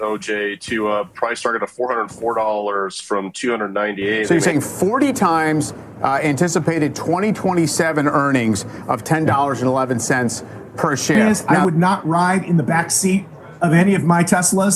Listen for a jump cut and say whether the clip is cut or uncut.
cut